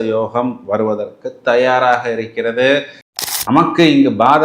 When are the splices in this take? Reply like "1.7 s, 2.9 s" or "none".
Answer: 3.0 s